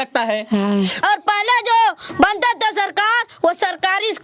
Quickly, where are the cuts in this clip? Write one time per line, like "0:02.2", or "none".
0:01.0